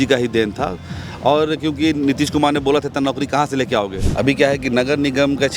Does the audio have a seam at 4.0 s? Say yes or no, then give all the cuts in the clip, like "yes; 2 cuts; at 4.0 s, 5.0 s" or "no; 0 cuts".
yes; 1 cut; at 4.0 s